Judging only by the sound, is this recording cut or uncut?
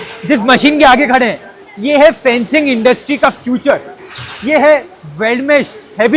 uncut